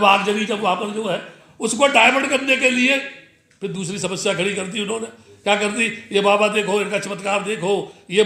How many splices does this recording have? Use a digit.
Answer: 0